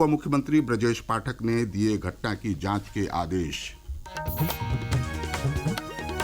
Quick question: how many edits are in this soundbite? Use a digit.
1